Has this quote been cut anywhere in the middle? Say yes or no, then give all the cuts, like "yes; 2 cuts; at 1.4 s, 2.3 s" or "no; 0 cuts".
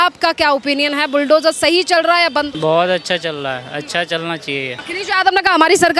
yes; 2 cuts; at 2.5 s, 4.8 s